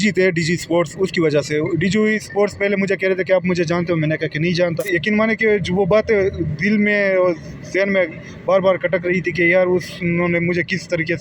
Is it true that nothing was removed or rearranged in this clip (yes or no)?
no